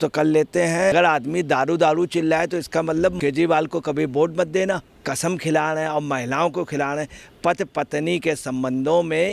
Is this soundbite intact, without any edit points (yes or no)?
no